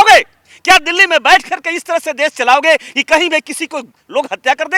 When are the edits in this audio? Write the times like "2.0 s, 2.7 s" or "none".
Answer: none